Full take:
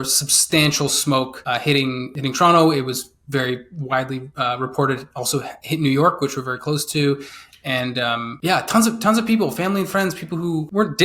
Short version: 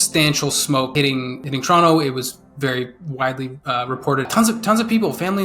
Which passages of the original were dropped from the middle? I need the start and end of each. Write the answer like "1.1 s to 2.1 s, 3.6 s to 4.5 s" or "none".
1.3 s to 1.6 s, 5.0 s to 8.7 s